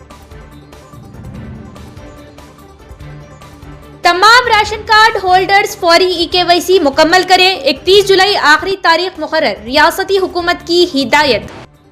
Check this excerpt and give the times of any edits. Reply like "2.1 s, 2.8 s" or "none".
1.0 s